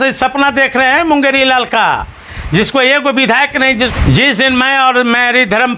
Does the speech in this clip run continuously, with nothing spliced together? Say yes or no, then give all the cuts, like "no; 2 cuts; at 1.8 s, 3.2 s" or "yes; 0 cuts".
no; 1 cut; at 3.9 s